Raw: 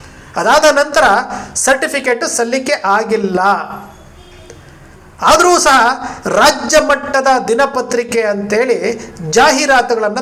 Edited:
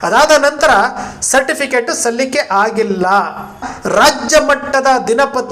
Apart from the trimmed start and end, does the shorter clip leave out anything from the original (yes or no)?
yes